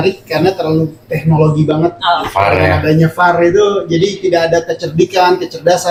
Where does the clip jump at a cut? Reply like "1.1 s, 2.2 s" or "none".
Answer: none